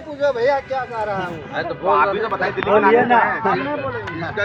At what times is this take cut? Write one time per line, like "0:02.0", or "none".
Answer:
none